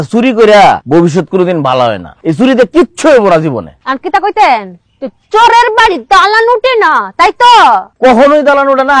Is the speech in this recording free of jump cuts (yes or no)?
no